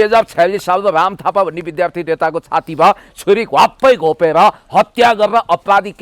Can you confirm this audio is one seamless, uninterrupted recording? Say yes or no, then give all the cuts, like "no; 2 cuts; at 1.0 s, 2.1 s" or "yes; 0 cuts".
yes; 0 cuts